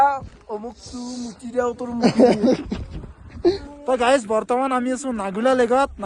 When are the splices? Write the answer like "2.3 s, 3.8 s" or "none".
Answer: 3.6 s

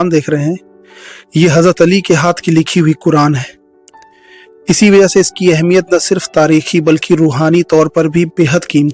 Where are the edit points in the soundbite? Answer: none

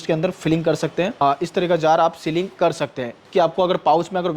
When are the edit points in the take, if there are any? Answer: 1.2 s, 3.1 s

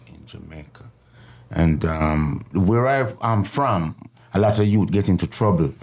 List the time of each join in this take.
2.5 s

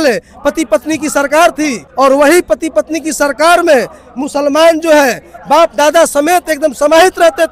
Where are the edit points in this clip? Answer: 1.8 s

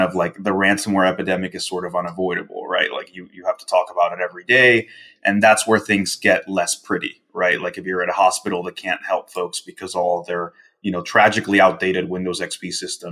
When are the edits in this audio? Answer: none

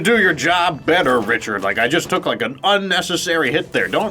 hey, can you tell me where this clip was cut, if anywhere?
none

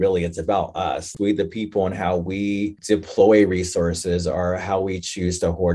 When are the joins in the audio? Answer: 1.1 s, 2.8 s

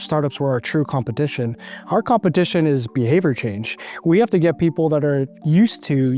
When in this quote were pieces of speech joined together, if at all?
none

